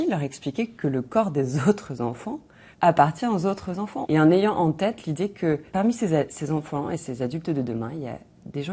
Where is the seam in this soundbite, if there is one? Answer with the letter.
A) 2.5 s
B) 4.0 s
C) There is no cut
B